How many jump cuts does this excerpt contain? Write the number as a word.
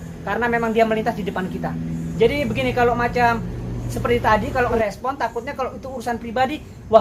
two